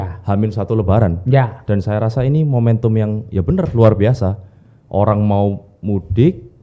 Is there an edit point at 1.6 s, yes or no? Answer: no